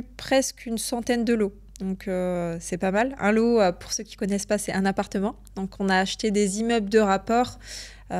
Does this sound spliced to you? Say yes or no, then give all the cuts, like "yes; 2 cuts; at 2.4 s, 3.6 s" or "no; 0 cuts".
no; 0 cuts